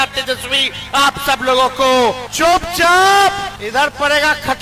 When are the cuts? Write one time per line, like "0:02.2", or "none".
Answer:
0:02.0
0:03.6

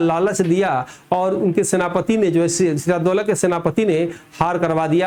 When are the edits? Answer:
none

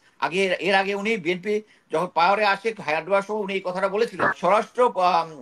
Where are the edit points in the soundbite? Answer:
0:04.4

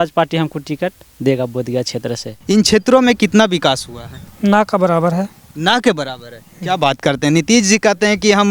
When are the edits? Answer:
0:02.3

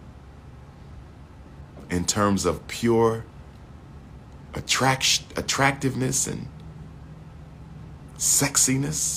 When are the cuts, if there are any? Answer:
none

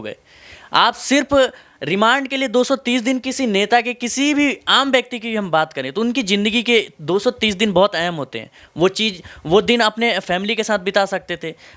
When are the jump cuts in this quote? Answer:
none

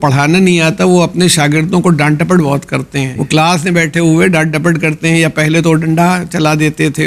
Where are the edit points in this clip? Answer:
0:03.2

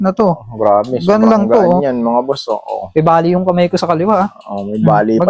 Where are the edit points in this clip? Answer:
none

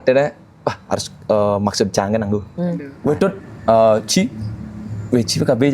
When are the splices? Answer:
0:02.9

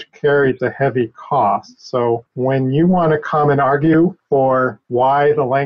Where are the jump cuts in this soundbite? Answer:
0:02.3
0:04.5

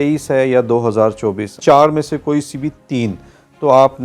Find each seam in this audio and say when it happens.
0:01.5

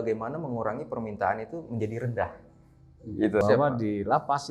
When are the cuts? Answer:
0:03.4

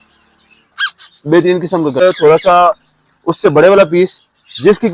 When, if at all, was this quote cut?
0:02.0

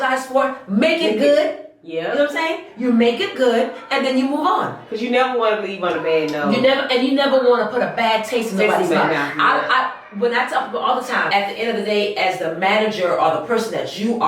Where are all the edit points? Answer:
0:11.3

